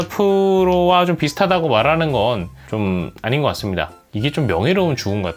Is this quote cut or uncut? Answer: uncut